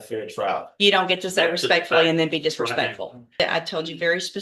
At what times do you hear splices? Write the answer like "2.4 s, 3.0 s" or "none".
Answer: 3.4 s